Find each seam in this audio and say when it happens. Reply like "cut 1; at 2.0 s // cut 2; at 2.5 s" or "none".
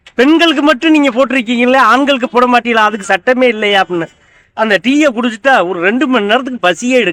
cut 1; at 4.4 s